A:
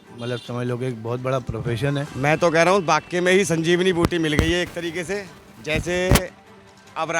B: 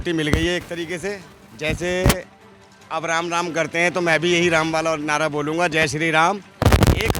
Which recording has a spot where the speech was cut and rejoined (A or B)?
A